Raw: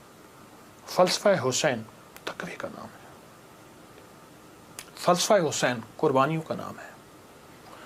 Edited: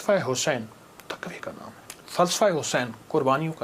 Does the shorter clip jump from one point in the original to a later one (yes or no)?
yes